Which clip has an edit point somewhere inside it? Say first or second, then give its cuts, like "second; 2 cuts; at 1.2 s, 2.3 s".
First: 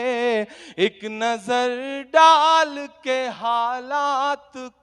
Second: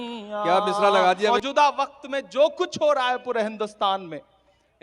second; 1 cut; at 1.3 s